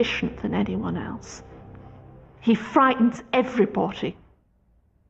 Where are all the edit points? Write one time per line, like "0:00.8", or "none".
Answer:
none